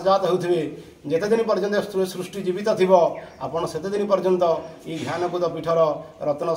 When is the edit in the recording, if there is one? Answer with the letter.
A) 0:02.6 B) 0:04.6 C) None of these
C